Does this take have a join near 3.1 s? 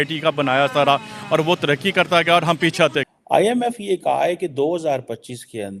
yes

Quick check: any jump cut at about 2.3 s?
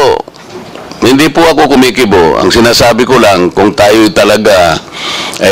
no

